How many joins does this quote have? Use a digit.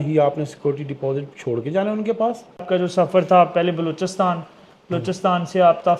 1